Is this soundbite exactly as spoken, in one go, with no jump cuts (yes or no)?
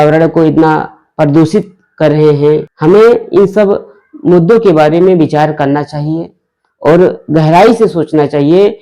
no